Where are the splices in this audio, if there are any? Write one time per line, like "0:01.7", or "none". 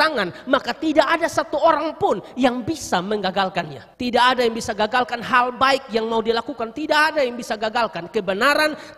0:03.8